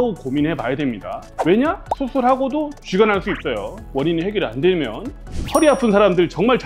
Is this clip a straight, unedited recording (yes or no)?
no